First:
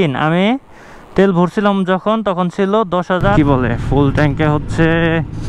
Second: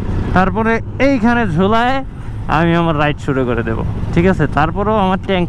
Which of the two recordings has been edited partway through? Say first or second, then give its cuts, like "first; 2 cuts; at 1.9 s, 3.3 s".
first; 1 cut; at 3.3 s